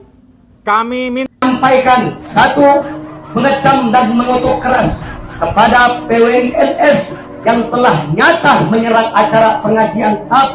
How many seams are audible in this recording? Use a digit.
1